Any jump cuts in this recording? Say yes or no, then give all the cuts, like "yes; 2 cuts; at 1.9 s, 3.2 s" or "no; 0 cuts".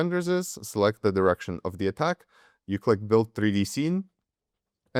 no; 0 cuts